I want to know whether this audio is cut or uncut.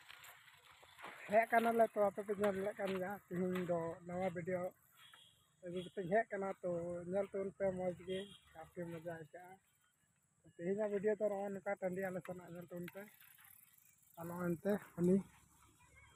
uncut